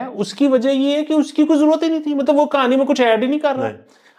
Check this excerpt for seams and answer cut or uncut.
uncut